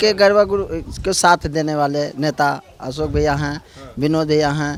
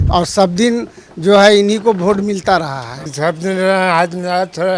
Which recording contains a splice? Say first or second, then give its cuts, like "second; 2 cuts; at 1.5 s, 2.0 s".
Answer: second; 1 cut; at 3.1 s